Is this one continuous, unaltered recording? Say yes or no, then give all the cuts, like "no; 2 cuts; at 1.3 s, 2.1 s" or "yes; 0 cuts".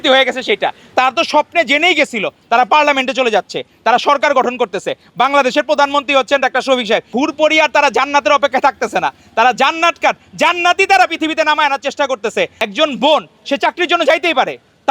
no; 3 cuts; at 0.9 s, 7.1 s, 12.6 s